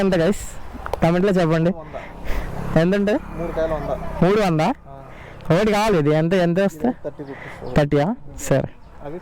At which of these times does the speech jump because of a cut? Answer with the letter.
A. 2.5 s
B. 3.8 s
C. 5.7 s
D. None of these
D